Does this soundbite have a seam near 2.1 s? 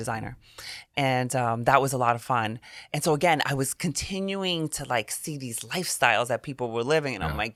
no; 0 cuts

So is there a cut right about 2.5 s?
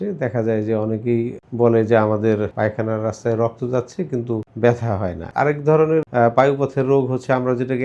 yes; 5 cuts; at 1.4 s, 2.5 s, 4.5 s, 5.2 s, 6.1 s

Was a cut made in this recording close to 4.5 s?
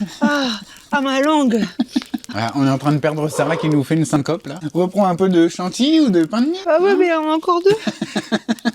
yes; 3 cuts; at 2.2 s, 4.5 s, 6.6 s

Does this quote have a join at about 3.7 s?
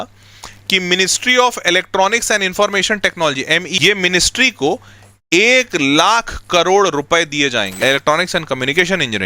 yes; 2 cuts; at 3.7 s, 7.8 s

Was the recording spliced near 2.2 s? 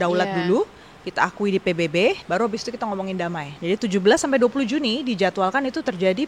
yes; 2 cuts; at 2.2 s, 3.5 s

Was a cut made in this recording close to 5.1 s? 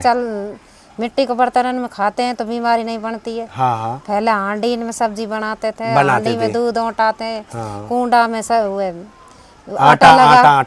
no; 0 cuts

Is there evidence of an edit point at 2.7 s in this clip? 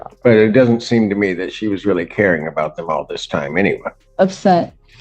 no; 1 cut; at 4.0 s

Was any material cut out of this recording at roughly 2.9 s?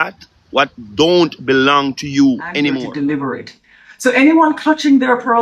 yes; 1 cut; at 2.9 s

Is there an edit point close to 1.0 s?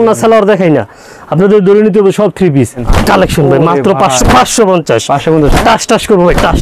no; 1 cut; at 2.8 s

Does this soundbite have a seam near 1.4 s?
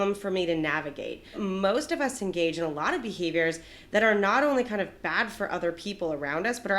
yes; 1 cut; at 1.4 s

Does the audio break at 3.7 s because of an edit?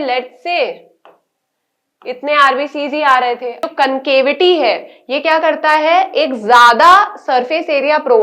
yes; 1 cut; at 3.7 s

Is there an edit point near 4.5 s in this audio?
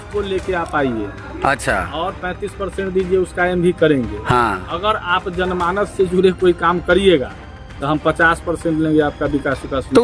no; 0 cuts

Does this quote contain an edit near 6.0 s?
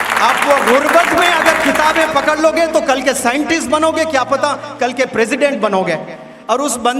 no; 0 cuts

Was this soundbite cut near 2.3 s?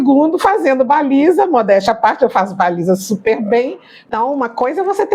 no; 1 cut; at 4.1 s

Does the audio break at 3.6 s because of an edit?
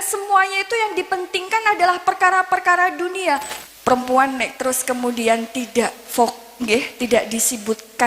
yes; 1 cut; at 3.6 s

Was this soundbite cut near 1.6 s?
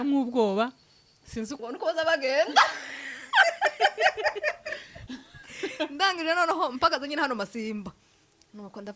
yes; 1 cut; at 1.6 s

